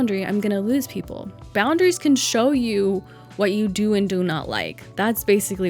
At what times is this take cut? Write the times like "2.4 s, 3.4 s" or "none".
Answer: 1.5 s